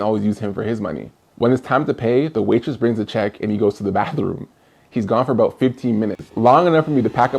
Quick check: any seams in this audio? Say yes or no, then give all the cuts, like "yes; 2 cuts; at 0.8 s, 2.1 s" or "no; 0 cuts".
yes; 1 cut; at 6.3 s